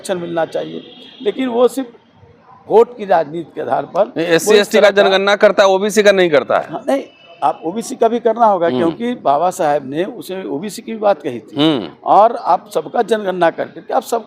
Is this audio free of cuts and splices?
yes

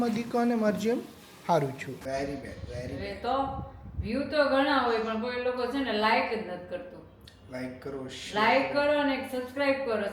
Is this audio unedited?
no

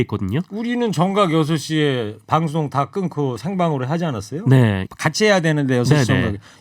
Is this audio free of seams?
no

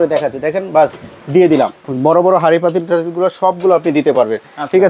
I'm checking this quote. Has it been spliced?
yes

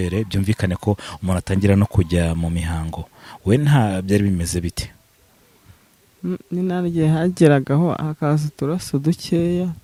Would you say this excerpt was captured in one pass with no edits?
yes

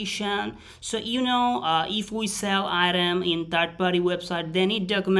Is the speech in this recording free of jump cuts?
yes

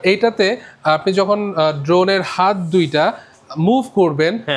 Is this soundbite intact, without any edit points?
yes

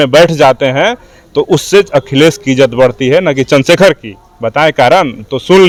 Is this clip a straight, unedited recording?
yes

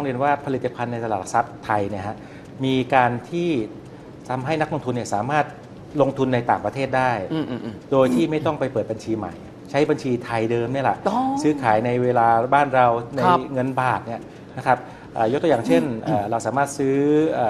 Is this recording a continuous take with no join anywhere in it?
yes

